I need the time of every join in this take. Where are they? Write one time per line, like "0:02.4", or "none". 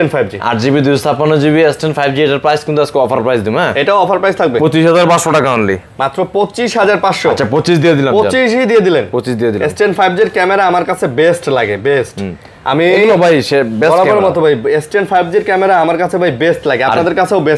none